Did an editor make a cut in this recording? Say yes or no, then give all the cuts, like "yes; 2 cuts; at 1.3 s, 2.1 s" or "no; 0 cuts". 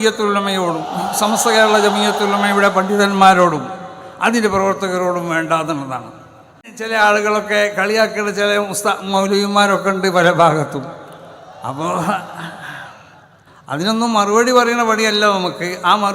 yes; 1 cut; at 6.8 s